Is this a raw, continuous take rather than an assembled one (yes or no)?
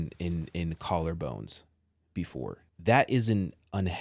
no